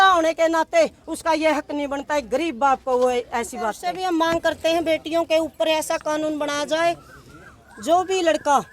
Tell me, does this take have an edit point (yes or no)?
yes